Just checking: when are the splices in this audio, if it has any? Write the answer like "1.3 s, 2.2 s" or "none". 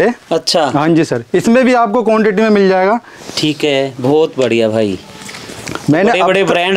none